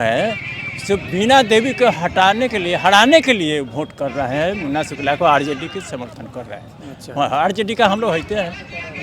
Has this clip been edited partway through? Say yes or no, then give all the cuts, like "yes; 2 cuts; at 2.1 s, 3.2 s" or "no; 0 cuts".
no; 0 cuts